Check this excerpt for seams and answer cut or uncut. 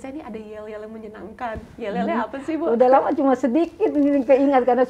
uncut